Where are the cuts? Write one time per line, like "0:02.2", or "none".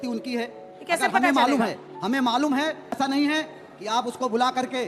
0:03.0

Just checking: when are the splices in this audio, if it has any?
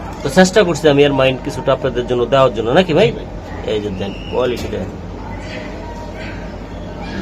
none

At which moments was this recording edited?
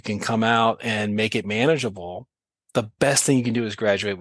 none

